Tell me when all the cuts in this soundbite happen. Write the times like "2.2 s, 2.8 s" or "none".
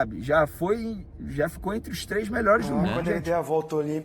3.1 s